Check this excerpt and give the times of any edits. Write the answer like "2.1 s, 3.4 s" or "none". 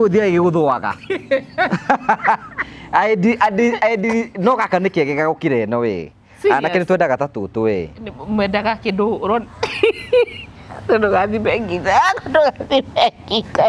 none

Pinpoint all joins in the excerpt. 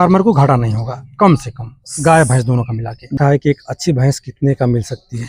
3.1 s

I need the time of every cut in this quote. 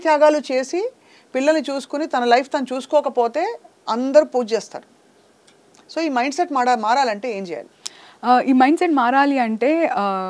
none

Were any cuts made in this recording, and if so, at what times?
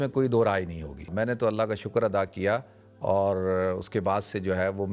1.1 s

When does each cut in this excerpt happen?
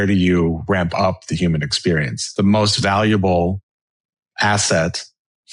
2.2 s

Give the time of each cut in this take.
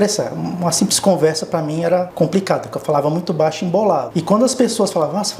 2.1 s, 4.1 s

